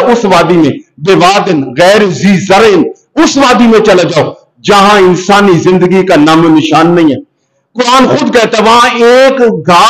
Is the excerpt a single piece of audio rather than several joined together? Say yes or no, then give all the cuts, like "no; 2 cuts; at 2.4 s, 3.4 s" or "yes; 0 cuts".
yes; 0 cuts